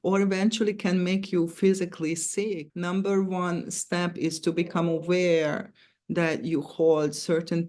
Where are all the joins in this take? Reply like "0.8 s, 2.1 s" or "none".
2.7 s